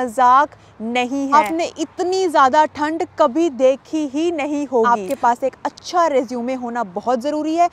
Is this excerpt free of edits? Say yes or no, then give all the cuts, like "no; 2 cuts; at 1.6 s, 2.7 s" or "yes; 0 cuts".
no; 2 cuts; at 1.3 s, 4.9 s